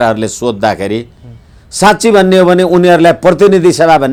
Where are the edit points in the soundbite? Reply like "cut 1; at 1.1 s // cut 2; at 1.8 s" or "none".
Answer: none